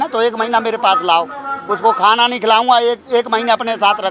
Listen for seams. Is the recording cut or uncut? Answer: uncut